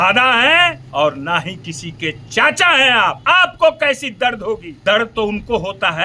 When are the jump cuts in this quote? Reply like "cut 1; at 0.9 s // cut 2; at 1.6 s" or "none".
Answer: cut 1; at 0.8 s // cut 2; at 3.2 s // cut 3; at 4.7 s